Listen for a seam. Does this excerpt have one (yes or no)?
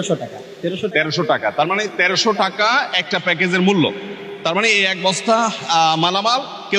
no